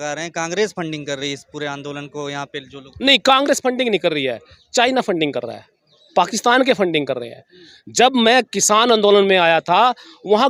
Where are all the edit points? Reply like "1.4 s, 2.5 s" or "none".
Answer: none